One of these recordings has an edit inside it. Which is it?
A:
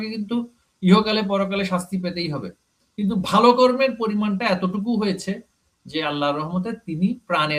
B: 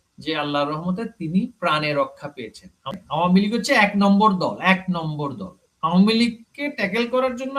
B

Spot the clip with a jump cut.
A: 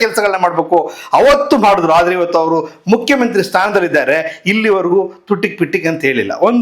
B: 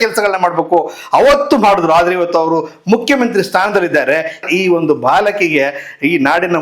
B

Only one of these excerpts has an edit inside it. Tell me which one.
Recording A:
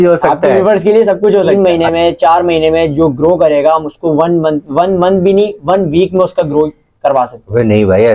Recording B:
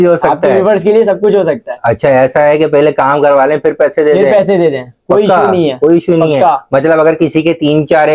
A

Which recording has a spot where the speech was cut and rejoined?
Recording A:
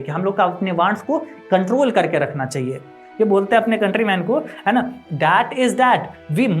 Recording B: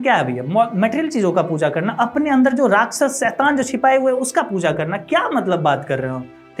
A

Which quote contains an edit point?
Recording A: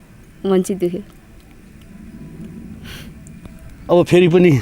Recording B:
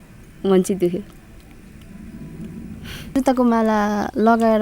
B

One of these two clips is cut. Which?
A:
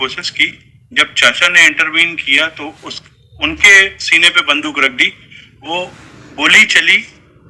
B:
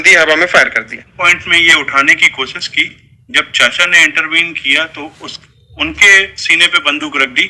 B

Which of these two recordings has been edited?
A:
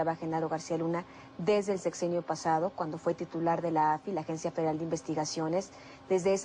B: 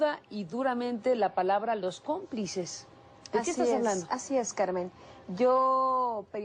B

